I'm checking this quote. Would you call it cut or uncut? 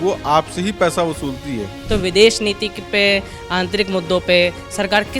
cut